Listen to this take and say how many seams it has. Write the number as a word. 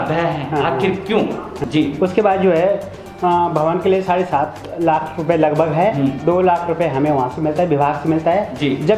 one